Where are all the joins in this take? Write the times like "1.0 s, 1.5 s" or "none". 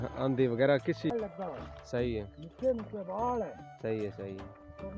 1.1 s